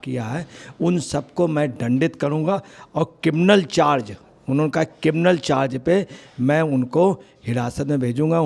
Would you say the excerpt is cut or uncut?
uncut